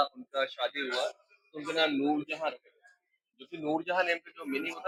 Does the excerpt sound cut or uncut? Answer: uncut